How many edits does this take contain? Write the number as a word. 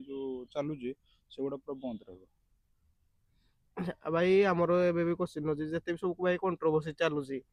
zero